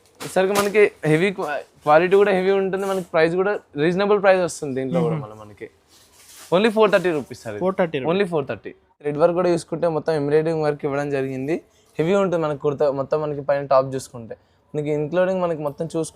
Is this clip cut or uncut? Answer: cut